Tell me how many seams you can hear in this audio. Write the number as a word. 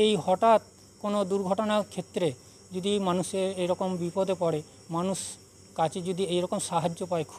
zero